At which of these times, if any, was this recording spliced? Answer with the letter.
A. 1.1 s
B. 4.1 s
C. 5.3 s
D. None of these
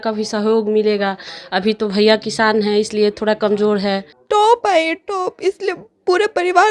B